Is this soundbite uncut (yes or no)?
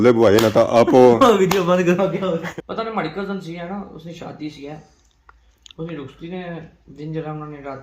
no